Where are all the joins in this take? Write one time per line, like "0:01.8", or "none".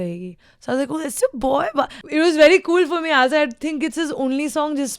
0:02.0